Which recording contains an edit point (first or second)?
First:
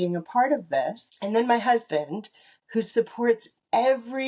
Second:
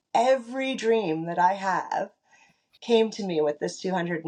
first